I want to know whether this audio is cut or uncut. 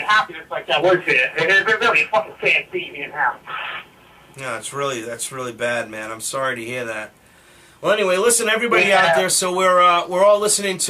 cut